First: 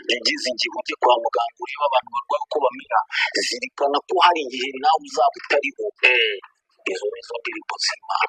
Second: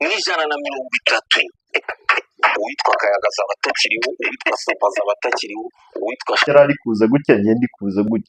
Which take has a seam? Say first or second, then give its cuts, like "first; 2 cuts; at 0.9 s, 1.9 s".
second; 1 cut; at 6.5 s